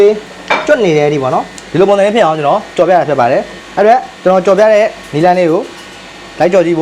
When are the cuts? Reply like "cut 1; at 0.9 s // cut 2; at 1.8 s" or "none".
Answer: cut 1; at 3.6 s